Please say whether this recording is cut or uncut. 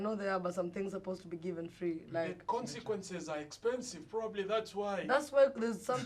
uncut